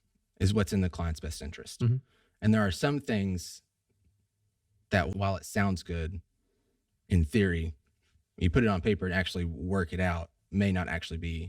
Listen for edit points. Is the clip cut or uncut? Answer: cut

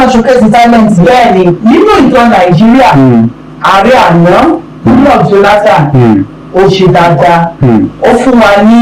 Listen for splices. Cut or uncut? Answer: uncut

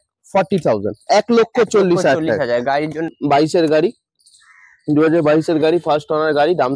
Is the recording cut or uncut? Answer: cut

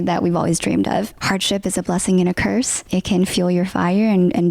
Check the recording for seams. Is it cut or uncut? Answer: cut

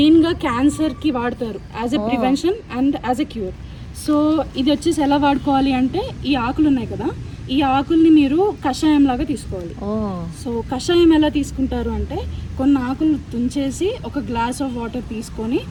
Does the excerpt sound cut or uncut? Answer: uncut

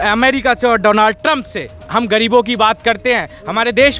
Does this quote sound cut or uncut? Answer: cut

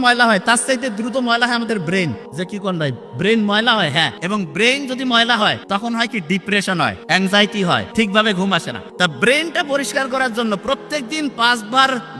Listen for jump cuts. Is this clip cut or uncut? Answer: cut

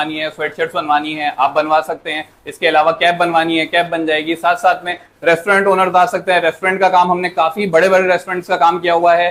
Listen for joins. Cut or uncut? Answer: uncut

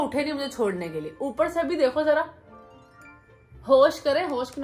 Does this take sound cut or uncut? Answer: uncut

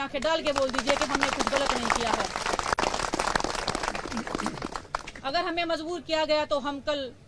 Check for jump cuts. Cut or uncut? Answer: uncut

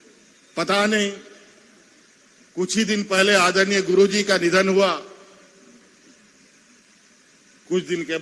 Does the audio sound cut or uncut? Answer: uncut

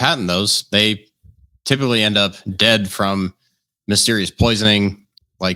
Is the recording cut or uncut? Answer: uncut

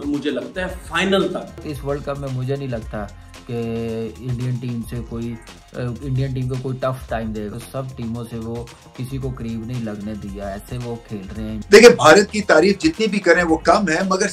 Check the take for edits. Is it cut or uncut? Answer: cut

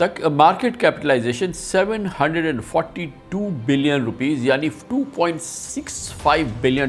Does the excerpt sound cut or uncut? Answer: uncut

